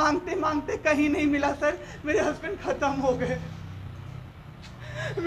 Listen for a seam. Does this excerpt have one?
no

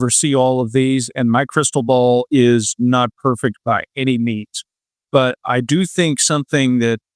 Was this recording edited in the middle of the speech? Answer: no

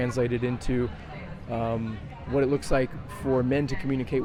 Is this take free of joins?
yes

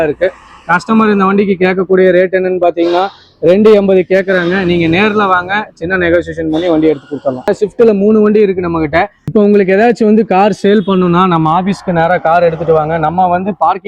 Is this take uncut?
no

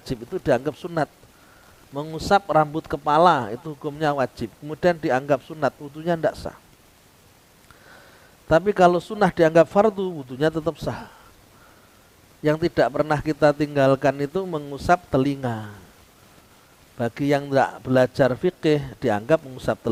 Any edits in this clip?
no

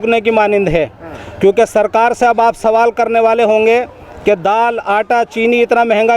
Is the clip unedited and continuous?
yes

